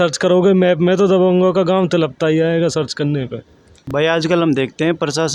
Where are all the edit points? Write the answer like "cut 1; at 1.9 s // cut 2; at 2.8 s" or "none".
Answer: none